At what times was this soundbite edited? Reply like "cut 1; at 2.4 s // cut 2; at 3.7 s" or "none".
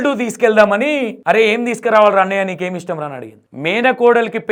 none